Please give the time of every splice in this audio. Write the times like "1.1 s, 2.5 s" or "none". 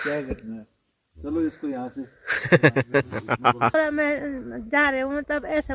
3.7 s